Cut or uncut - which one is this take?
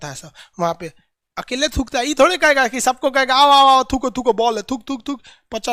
uncut